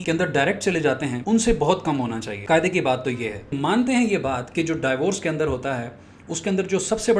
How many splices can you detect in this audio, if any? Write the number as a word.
three